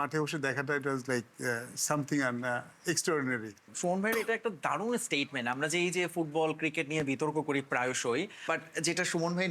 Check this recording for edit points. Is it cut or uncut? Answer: uncut